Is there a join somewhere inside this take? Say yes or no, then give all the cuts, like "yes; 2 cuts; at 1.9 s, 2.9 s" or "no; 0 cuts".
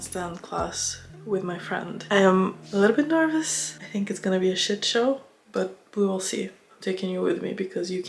no; 0 cuts